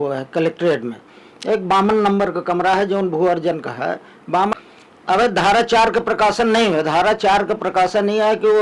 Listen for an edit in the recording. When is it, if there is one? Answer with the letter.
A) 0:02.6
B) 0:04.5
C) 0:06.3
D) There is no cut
B